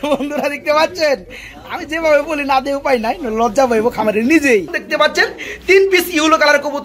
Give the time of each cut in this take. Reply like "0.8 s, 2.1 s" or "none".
4.8 s